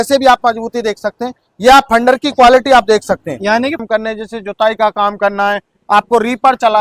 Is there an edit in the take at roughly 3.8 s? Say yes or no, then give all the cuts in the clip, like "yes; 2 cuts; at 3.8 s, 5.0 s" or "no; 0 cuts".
yes; 1 cut; at 3.8 s